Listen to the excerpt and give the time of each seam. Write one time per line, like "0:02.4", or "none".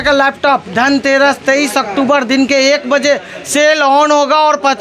none